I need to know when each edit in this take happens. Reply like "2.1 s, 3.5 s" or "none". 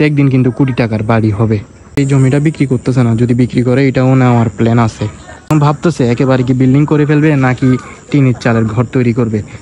2.0 s, 5.5 s